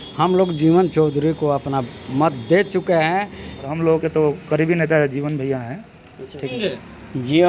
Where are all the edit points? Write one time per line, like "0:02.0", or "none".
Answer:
0:03.7
0:06.5

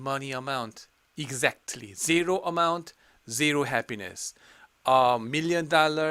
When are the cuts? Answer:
none

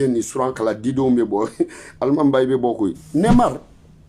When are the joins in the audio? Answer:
0:03.0

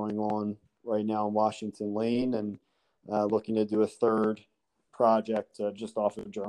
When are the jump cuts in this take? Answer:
none

